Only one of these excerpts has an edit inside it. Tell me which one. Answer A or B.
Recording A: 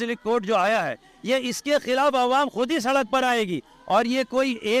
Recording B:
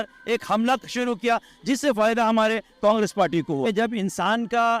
B